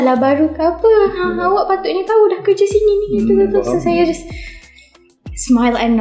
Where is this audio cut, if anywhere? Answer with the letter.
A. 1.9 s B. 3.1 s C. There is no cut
C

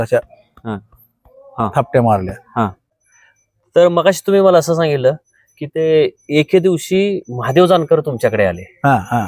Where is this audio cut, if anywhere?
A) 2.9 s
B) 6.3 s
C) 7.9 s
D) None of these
A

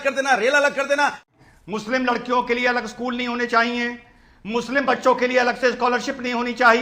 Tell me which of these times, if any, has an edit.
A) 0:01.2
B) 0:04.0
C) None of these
A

